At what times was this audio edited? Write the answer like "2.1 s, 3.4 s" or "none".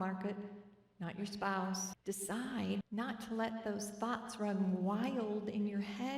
1.9 s, 2.8 s